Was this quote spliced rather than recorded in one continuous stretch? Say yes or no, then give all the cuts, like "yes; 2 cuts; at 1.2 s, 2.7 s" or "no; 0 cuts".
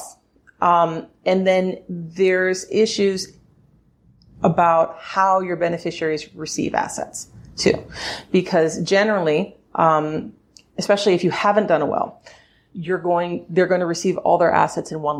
no; 0 cuts